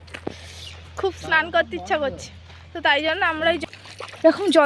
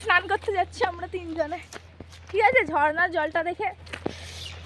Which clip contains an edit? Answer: first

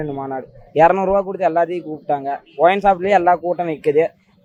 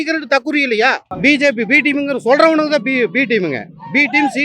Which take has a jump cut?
second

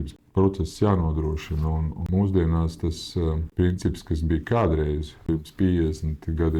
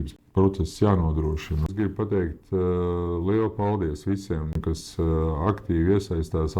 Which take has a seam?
second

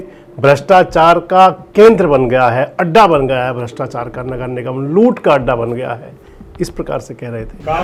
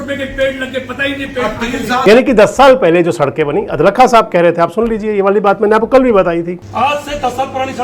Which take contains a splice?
second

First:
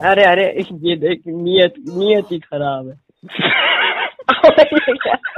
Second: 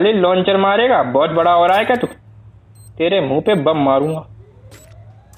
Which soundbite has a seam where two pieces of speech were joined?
second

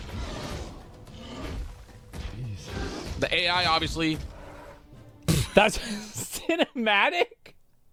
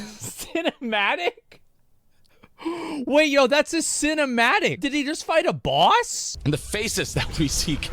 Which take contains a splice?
second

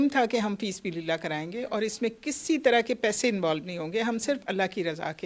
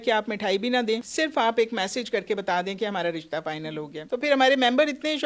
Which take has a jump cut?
second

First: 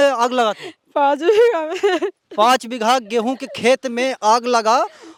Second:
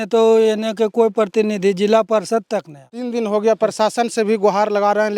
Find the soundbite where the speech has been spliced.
second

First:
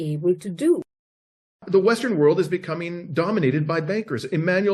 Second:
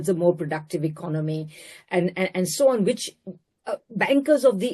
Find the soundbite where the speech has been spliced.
first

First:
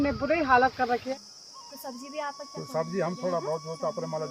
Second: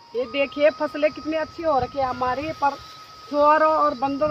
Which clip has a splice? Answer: first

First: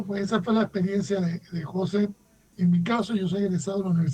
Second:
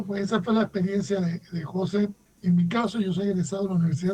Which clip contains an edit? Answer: second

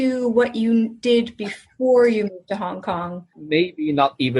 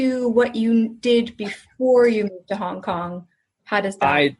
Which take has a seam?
first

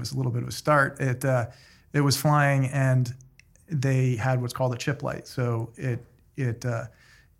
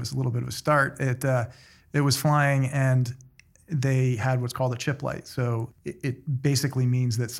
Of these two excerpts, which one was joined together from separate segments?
second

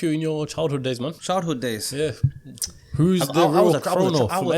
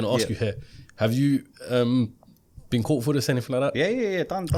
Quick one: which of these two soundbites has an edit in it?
first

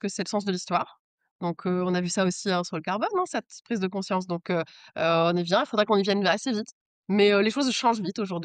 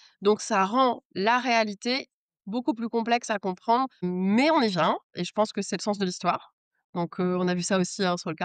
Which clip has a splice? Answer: second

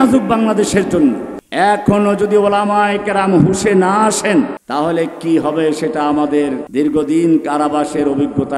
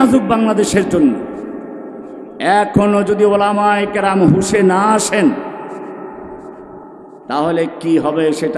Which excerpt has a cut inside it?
first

